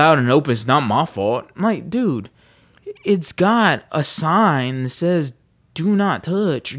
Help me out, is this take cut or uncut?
uncut